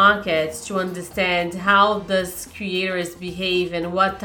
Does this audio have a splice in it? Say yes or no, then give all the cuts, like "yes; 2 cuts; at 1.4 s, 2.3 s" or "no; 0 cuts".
no; 0 cuts